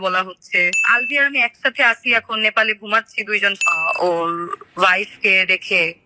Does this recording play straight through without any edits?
no; 2 cuts; at 0.9 s, 3.6 s

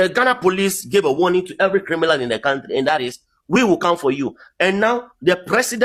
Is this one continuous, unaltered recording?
yes; 0 cuts

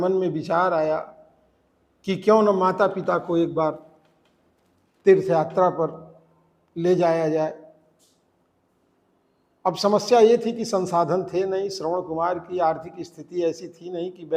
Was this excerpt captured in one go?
yes; 0 cuts

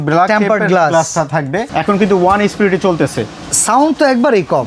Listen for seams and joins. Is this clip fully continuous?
no; 1 cut; at 1.7 s

